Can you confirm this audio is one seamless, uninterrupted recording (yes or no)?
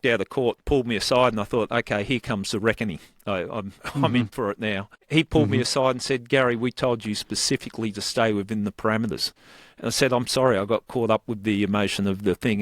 no